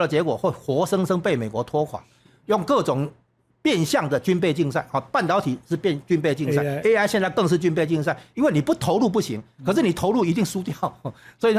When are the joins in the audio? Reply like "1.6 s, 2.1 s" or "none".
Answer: none